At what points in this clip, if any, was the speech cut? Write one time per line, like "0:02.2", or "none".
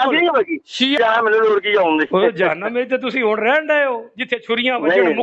0:01.0